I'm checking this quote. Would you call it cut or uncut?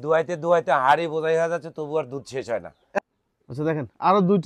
cut